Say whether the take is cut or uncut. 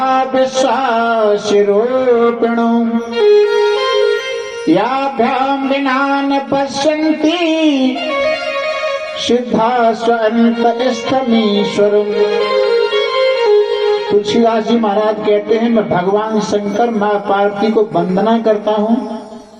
uncut